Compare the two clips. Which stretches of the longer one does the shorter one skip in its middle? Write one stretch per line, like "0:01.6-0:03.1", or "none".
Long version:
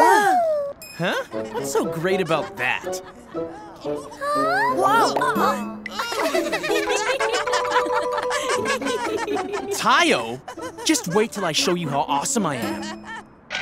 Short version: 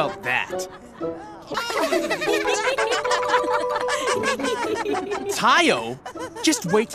0:03.7-0:05.8